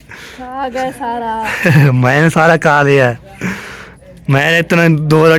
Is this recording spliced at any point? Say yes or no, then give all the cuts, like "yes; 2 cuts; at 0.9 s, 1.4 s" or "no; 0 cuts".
no; 0 cuts